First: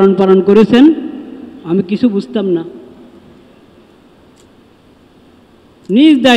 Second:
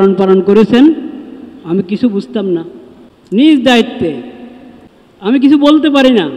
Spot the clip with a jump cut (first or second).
second